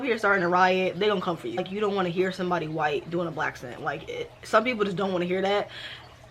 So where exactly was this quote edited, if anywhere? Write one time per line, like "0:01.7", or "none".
0:01.7